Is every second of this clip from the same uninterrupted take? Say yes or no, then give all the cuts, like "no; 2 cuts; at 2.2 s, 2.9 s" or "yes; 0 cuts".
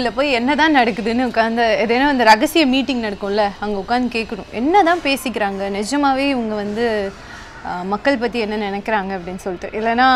yes; 0 cuts